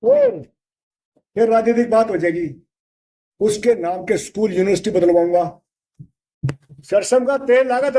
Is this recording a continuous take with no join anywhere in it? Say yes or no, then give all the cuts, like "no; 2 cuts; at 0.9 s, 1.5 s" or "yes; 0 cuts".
no; 1 cut; at 6.4 s